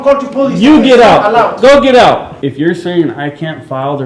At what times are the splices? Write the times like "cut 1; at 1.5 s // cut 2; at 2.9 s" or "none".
cut 1; at 2.3 s

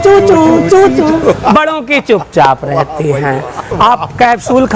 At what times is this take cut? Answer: cut 1; at 3.7 s

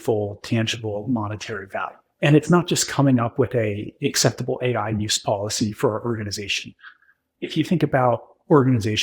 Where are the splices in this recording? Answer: cut 1; at 2.0 s

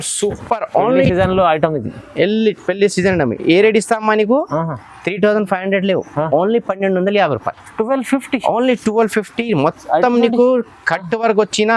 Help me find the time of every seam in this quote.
none

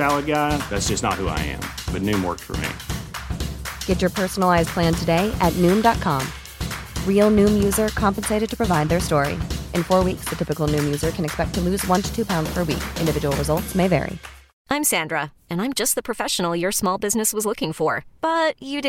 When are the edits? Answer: cut 1; at 14.5 s

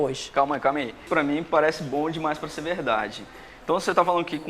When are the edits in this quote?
cut 1; at 1.1 s

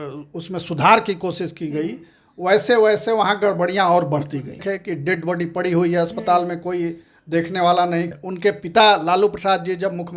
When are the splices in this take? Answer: cut 1; at 4.6 s // cut 2; at 8.2 s

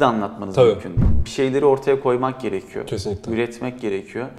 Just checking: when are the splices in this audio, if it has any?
cut 1; at 0.9 s

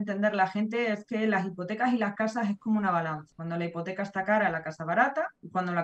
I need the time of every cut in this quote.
none

